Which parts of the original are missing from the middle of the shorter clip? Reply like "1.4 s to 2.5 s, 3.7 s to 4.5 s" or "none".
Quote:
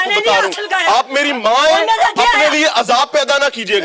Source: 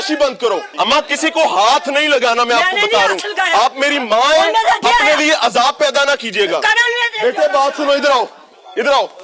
none